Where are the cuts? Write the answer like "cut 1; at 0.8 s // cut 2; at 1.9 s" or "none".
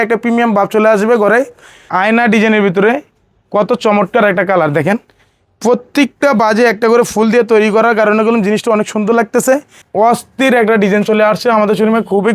cut 1; at 1.8 s // cut 2; at 9.8 s